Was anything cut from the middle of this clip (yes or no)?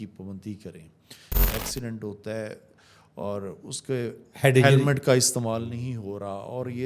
yes